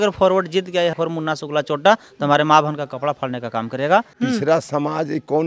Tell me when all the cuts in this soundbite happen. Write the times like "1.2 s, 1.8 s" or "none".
4.1 s